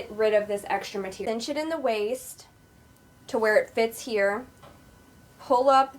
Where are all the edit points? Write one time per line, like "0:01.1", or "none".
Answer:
0:01.2